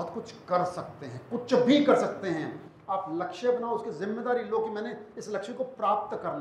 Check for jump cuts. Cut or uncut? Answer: uncut